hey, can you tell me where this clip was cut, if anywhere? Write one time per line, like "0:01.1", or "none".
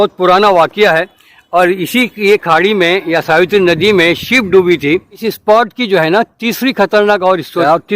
0:05.3